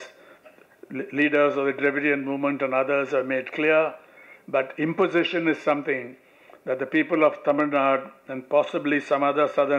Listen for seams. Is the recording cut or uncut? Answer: uncut